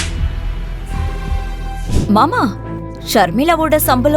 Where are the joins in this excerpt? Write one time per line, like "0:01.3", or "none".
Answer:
0:01.9